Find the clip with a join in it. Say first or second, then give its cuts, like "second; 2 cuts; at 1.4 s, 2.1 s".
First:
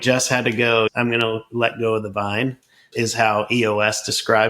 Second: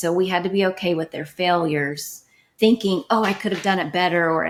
first; 1 cut; at 0.9 s